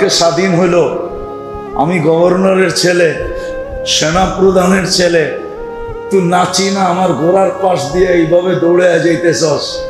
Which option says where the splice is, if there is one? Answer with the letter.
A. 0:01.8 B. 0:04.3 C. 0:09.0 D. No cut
D